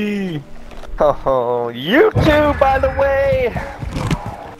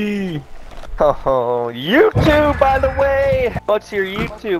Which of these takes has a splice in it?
second; 1 cut; at 3.6 s

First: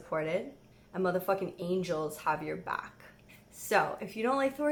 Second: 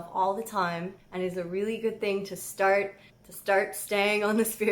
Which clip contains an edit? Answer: second; 1 cut; at 1.0 s

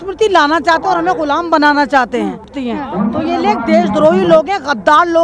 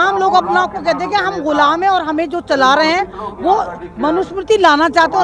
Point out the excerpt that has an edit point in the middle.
first; 1 cut; at 2.5 s

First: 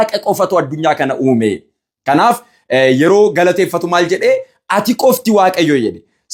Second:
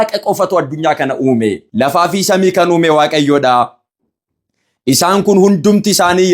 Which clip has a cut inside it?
second; 1 cut; at 1.6 s

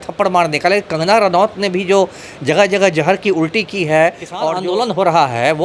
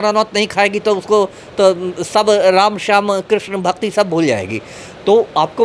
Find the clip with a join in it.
first; 1 cut; at 4.5 s

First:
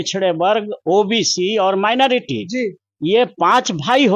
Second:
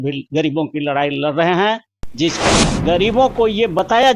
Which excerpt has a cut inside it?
second; 1 cut; at 2.5 s

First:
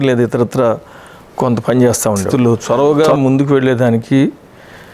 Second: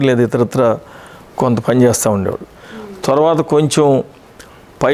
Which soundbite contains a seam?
first; 1 cut; at 2.3 s

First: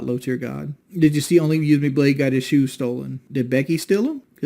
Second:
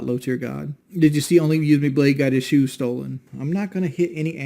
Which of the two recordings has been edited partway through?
second; 1 cut; at 3.2 s

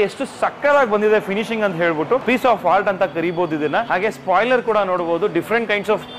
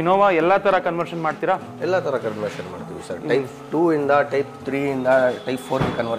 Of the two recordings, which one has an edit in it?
first; 2 cuts; at 2.2 s, 3.9 s

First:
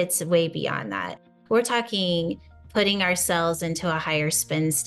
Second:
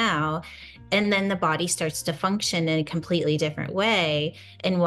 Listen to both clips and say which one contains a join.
first; 1 cut; at 1.2 s

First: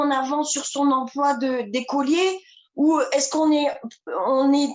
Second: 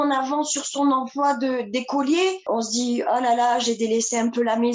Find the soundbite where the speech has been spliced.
second; 1 cut; at 2.5 s

